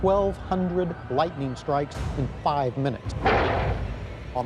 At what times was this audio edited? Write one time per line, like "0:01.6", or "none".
none